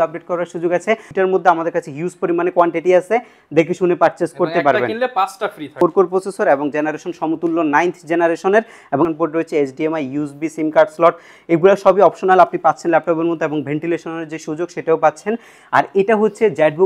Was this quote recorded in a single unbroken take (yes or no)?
no